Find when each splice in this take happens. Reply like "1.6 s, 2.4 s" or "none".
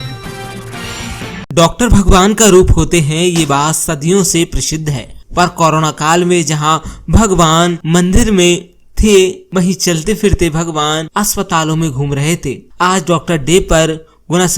1.5 s